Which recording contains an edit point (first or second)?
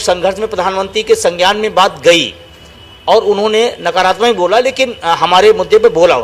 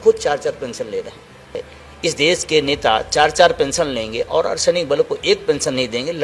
second